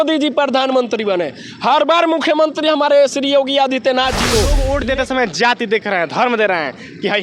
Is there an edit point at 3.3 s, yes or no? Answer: no